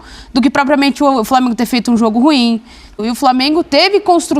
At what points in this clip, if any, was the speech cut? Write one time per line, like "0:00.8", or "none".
0:03.0